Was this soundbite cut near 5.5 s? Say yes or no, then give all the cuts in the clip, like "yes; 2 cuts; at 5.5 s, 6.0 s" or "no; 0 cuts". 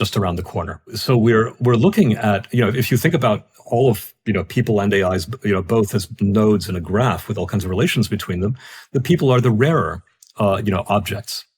no; 1 cut; at 1.0 s